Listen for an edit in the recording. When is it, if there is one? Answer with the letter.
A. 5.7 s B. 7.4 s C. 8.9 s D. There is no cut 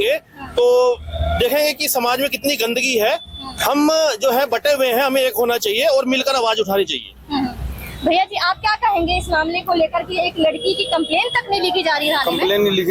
D